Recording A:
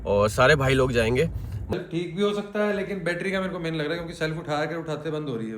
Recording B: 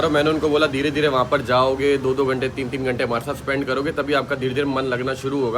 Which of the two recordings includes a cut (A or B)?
A